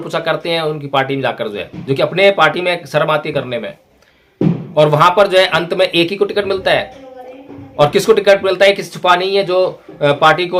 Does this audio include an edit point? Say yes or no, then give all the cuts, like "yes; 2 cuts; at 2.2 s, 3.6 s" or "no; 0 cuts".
no; 0 cuts